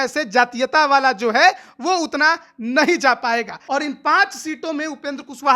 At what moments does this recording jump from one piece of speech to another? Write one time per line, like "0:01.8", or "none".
0:03.6